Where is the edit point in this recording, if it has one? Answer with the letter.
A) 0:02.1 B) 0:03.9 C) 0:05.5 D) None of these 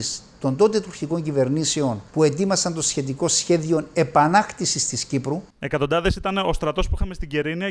C